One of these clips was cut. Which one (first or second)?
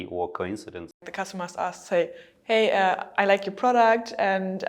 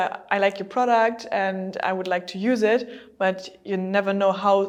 first